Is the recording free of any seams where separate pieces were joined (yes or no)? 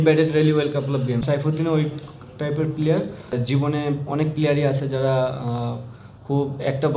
no